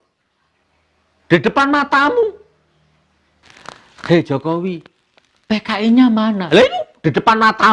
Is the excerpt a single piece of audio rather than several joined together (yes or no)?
no